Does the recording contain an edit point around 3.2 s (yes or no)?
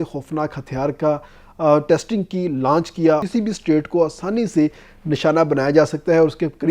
yes